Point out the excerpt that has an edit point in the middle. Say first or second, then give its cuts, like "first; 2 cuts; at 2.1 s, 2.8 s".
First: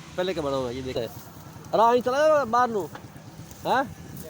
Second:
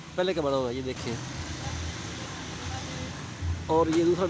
first; 1 cut; at 1.0 s